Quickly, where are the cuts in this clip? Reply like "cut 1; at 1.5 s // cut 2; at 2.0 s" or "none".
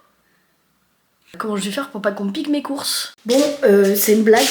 cut 1; at 1.3 s // cut 2; at 3.1 s